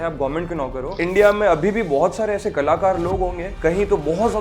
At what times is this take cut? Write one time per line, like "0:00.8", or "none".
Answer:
0:01.0
0:03.5